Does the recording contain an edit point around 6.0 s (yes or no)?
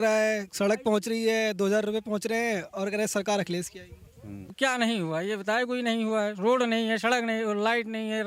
no